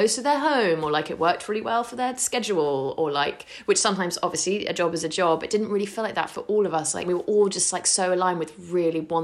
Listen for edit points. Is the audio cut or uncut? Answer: cut